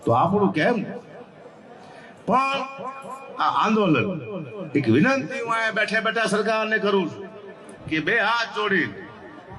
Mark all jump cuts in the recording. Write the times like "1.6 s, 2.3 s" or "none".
none